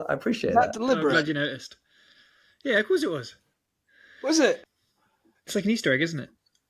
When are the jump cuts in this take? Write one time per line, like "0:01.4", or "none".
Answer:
0:04.6